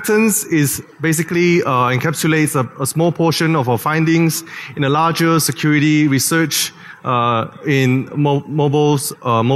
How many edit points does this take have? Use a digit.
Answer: 0